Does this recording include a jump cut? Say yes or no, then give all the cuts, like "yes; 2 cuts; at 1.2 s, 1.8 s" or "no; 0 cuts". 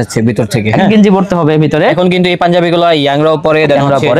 no; 0 cuts